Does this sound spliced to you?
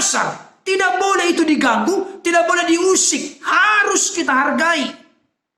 no; 0 cuts

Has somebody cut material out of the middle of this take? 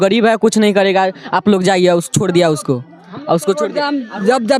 no; 0 cuts

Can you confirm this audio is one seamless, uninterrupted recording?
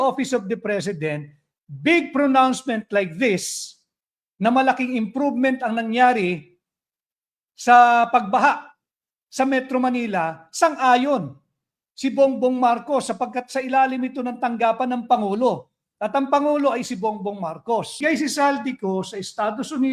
no; 1 cut; at 18.0 s

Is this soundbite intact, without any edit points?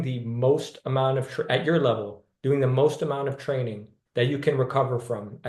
yes; 0 cuts

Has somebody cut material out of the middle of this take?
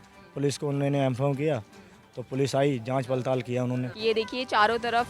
yes; 1 cut; at 3.9 s

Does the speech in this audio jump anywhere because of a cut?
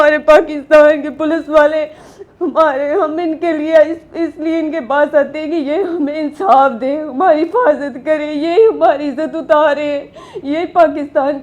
no; 0 cuts

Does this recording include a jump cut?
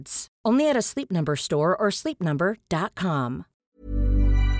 yes; 1 cut; at 3.5 s

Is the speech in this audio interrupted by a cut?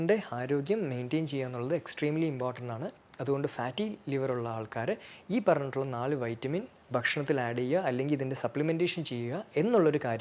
no; 0 cuts

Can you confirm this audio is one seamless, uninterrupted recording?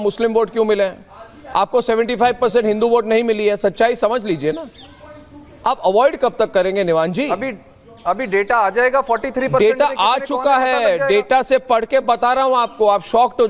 yes; 0 cuts

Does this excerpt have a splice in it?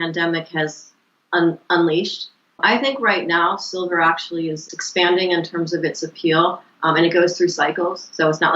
yes; 1 cut; at 2.6 s

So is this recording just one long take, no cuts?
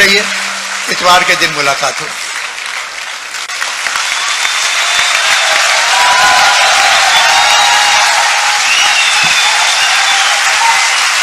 yes; 0 cuts

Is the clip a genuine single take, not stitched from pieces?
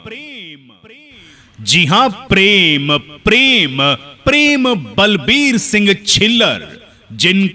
no; 1 cut; at 1.1 s

